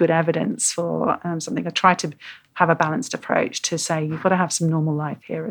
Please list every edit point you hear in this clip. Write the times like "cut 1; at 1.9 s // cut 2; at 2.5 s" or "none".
none